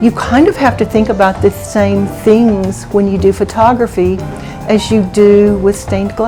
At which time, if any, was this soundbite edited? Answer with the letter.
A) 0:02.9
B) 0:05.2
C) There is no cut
C